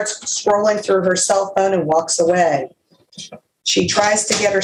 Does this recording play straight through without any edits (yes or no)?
yes